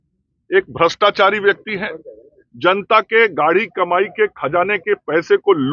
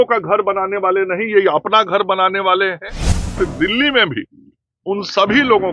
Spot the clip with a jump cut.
second; 1 cut; at 3.3 s

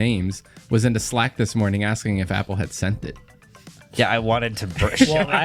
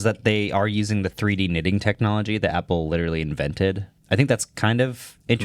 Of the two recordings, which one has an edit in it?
second; 1 cut; at 3.9 s

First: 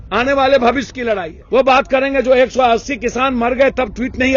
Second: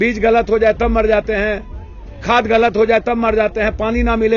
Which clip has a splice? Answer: first; 1 cut; at 1.3 s

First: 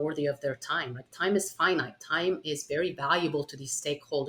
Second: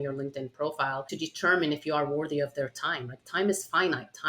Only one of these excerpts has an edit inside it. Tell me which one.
second; 1 cut; at 1.1 s

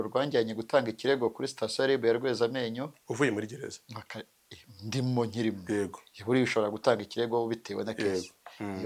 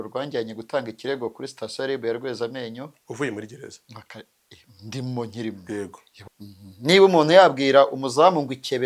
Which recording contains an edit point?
second; 1 cut; at 6.1 s

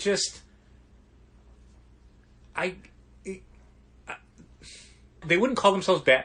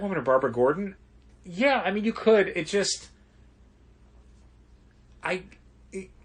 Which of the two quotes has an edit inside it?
first; 1 cut; at 5.2 s

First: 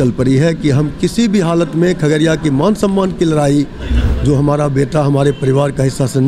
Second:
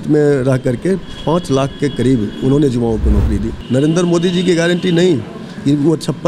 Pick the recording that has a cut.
second; 1 cut; at 3.6 s

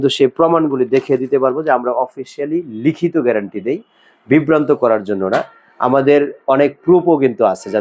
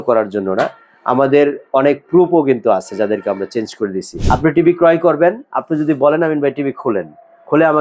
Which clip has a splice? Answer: second; 1 cut; at 4.1 s

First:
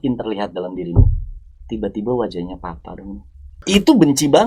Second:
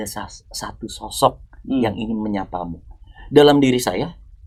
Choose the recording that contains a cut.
first; 1 cut; at 3.6 s

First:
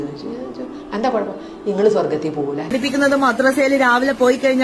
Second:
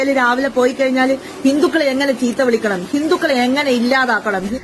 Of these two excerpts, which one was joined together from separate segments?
first; 1 cut; at 2.7 s

